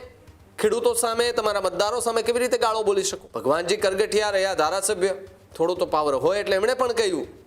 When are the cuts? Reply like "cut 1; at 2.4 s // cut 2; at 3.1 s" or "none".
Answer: cut 1; at 3.2 s